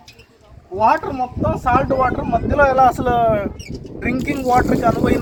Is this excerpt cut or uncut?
uncut